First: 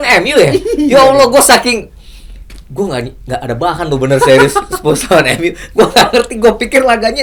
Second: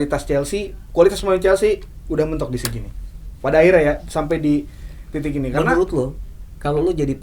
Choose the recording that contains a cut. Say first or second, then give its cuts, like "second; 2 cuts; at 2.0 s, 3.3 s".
second; 1 cut; at 5.5 s